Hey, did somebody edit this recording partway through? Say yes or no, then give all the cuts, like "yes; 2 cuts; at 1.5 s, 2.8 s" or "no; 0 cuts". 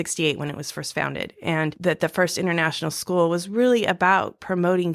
yes; 1 cut; at 1.8 s